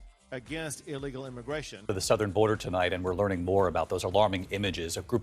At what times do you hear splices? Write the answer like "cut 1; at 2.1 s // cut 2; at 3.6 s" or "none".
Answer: cut 1; at 1.8 s